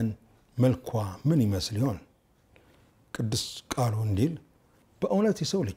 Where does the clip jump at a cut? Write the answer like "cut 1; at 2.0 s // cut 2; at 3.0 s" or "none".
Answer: none